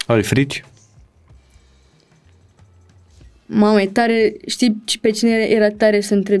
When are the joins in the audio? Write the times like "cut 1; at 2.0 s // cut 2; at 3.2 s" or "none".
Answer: none